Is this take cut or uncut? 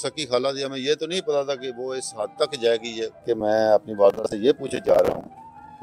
cut